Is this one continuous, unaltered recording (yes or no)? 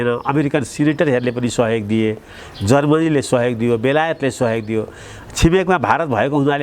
yes